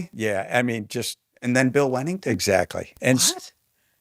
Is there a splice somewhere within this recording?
yes; 1 cut; at 2.9 s

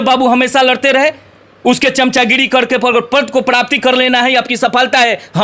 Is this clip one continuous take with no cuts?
yes; 0 cuts

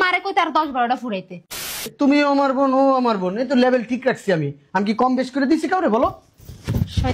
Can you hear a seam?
yes; 1 cut; at 1.9 s

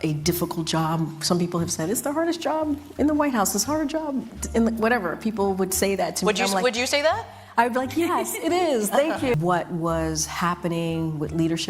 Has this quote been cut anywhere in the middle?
yes; 1 cut; at 9.4 s

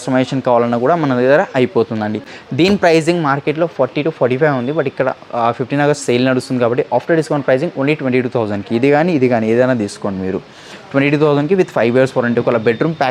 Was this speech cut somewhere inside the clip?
no; 0 cuts

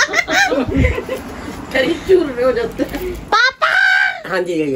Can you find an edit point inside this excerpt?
no; 0 cuts

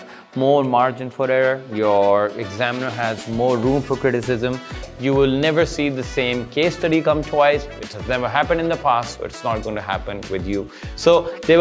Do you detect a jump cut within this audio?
yes; 1 cut; at 4.9 s

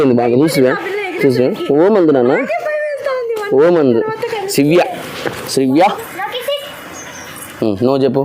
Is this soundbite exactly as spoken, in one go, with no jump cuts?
no; 1 cut; at 5.8 s

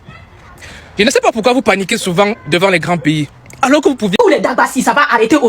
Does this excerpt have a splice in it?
yes; 1 cut; at 4.1 s

